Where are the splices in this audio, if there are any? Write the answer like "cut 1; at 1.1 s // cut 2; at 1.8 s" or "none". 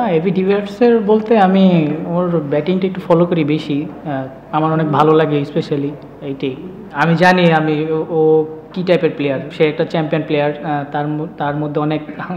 cut 1; at 6.8 s // cut 2; at 9.5 s